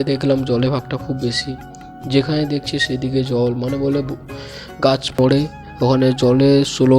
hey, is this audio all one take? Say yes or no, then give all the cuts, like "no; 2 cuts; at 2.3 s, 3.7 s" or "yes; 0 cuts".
no; 1 cut; at 5.2 s